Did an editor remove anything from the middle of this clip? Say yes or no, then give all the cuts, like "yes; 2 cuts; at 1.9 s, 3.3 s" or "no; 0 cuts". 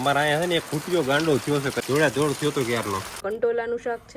yes; 2 cuts; at 1.8 s, 3.2 s